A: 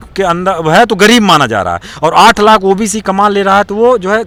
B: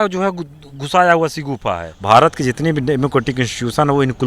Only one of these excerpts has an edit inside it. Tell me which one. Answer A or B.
B